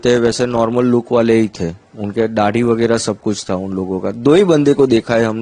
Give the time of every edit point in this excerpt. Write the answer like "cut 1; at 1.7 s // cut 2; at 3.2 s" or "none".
none